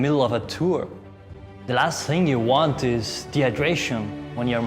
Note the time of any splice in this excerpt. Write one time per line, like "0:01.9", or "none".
0:01.3